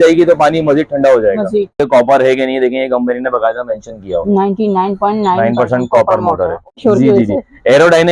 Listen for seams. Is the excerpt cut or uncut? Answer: cut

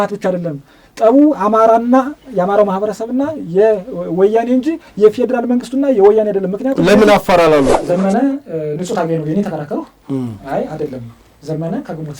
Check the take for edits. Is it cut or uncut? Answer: cut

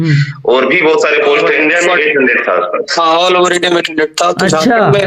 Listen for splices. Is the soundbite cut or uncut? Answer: cut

